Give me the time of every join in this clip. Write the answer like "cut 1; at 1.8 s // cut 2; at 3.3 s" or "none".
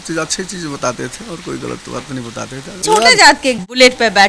cut 1; at 2.8 s